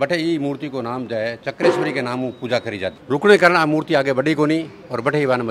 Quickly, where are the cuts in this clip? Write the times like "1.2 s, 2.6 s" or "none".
2.9 s

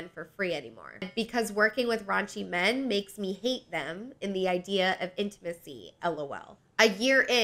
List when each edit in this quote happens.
1.1 s

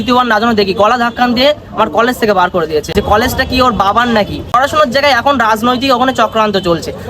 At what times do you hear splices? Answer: 2.9 s, 4.6 s

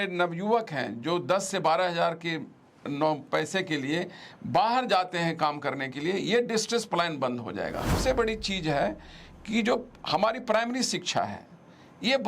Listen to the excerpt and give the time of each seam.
8.0 s

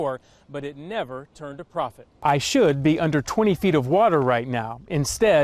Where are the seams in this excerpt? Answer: 2.0 s

